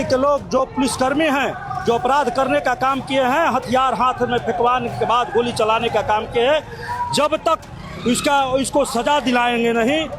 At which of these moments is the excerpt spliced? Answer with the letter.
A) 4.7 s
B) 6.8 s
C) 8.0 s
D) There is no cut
D